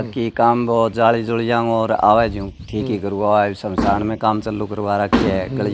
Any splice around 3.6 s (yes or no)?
no